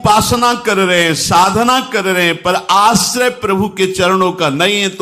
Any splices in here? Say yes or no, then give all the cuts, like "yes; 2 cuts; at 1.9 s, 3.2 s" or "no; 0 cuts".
no; 0 cuts